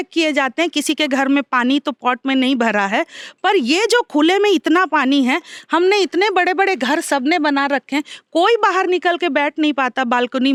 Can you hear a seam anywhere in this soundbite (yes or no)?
no